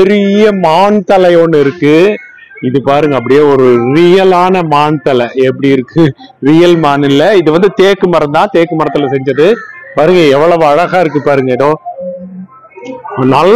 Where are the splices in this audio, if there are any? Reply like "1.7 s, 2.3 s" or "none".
none